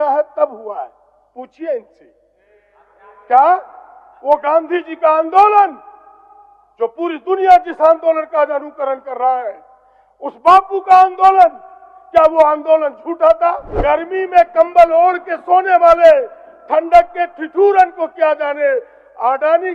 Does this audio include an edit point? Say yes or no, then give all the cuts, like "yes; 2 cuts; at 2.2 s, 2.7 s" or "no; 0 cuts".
yes; 1 cut; at 13.7 s